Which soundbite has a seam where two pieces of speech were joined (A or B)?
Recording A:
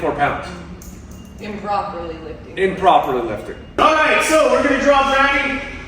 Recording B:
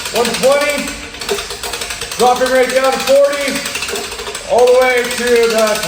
A